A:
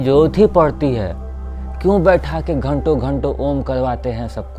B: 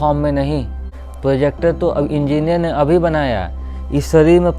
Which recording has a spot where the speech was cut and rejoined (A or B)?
B